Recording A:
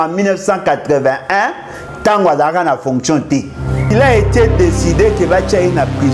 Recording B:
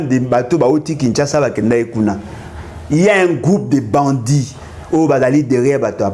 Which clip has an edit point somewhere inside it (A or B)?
A